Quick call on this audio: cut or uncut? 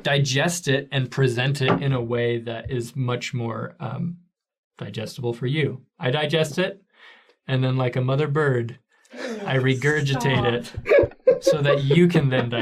uncut